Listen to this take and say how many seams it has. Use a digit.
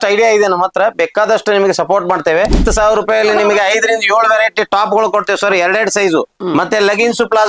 1